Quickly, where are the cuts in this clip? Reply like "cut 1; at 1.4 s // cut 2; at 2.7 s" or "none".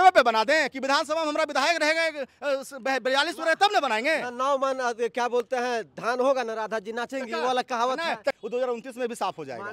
cut 1; at 8.4 s